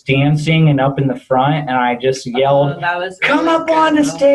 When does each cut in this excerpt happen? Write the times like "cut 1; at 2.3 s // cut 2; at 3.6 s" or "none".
none